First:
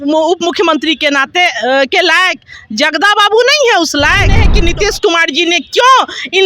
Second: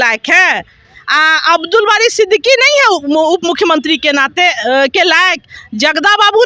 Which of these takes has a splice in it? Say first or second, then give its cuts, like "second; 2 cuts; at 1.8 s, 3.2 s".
first; 1 cut; at 4.5 s